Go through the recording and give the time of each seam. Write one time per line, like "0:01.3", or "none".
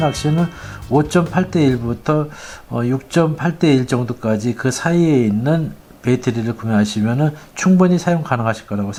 none

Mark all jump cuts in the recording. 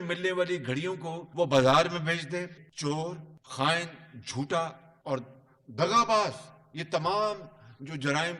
0:01.2
0:02.6
0:04.9

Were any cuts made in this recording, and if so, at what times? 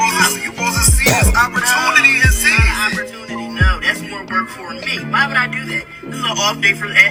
none

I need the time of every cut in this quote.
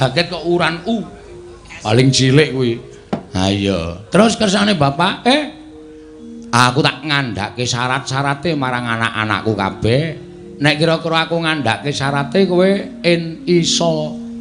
none

